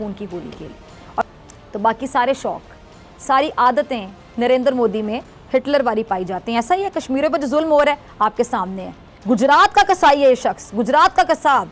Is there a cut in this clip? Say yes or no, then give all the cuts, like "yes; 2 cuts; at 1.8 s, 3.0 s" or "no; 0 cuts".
yes; 1 cut; at 1.3 s